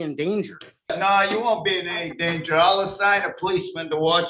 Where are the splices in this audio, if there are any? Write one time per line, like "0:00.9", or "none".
0:00.9